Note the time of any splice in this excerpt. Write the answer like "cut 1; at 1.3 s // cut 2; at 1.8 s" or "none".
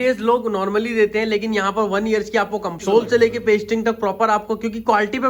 cut 1; at 2.9 s